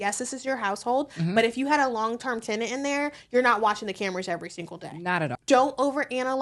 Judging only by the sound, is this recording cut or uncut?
cut